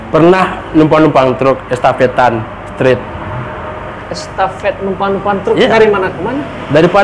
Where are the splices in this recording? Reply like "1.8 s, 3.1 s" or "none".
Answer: none